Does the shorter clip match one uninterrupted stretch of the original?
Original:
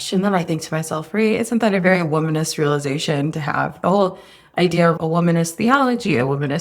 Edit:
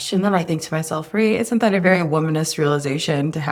yes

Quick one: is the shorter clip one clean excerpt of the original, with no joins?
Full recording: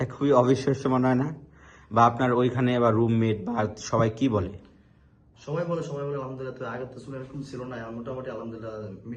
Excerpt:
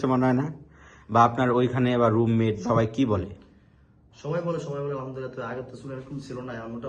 no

